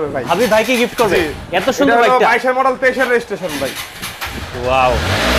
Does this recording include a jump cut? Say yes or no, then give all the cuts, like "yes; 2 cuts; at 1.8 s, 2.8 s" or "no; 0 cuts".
no; 0 cuts